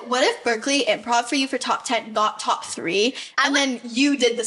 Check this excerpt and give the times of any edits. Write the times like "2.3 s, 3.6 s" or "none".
none